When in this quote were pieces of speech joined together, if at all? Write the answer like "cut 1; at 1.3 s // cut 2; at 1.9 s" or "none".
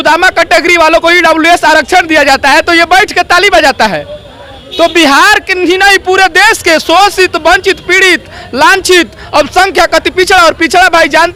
none